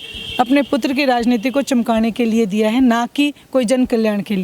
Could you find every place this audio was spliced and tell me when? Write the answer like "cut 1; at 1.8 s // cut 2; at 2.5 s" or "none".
none